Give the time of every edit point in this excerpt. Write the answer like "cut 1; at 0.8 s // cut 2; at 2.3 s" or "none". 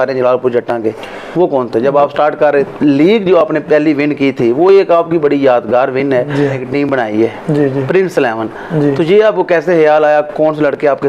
cut 1; at 2.7 s // cut 2; at 6.6 s